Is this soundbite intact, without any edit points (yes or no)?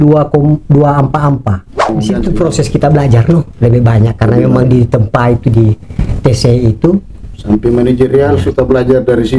no